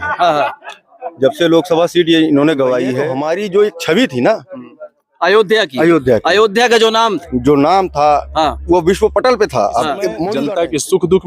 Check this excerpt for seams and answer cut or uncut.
cut